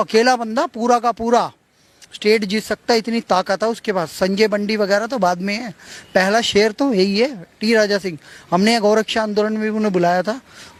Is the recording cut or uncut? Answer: uncut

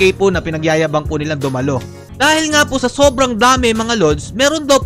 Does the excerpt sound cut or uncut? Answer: cut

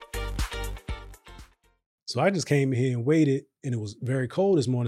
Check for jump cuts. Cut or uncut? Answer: cut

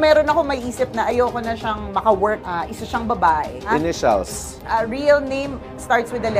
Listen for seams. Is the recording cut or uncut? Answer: cut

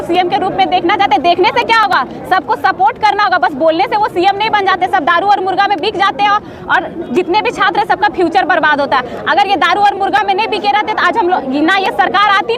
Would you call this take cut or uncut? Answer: uncut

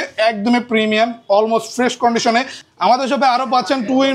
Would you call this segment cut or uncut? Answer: cut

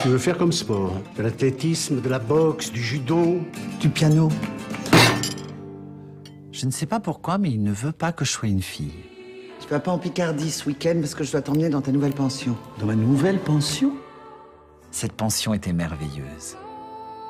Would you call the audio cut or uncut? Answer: uncut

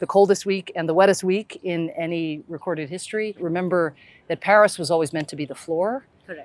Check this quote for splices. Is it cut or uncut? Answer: cut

